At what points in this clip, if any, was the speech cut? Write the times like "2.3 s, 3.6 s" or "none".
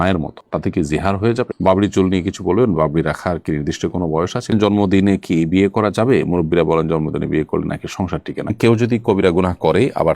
1.5 s, 4.5 s, 8.5 s